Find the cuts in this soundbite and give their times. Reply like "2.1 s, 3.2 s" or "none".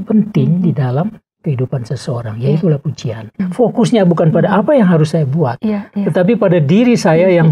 3.4 s